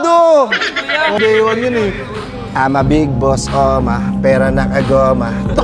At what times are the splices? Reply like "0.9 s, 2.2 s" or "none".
1.2 s